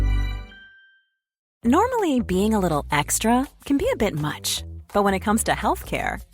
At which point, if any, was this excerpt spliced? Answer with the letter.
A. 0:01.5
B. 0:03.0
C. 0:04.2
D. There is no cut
A